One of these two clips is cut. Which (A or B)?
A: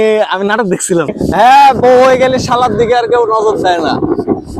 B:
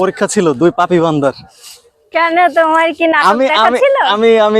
A